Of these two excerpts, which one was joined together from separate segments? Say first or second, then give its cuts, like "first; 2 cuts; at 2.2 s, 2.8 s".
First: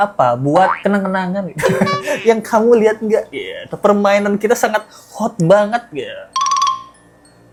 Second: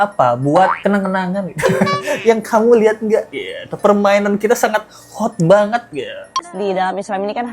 second; 1 cut; at 6.3 s